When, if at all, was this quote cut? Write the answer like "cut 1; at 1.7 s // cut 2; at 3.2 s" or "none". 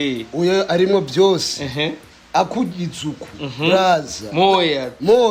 none